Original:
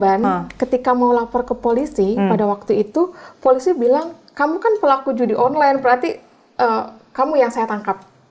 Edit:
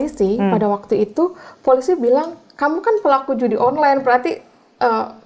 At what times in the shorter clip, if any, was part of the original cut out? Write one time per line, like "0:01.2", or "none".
none